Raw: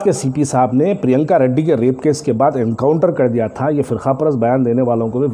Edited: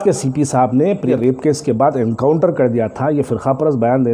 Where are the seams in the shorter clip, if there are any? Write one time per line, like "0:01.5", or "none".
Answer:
0:01.1